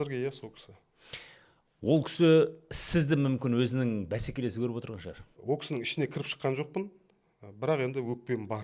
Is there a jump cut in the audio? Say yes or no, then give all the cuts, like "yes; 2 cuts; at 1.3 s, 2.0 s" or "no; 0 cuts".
yes; 1 cut; at 5.3 s